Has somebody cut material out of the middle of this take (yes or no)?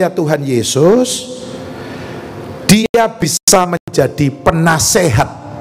no